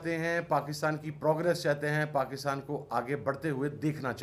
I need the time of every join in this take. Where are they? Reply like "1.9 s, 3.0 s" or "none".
none